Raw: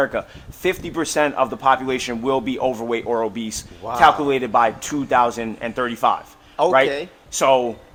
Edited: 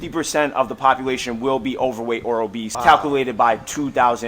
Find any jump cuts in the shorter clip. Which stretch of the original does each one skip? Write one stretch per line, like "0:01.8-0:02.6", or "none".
0:03.5-0:03.8